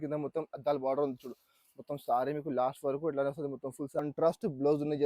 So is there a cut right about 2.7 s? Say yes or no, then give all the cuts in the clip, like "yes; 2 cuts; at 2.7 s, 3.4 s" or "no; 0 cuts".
no; 1 cut; at 4.0 s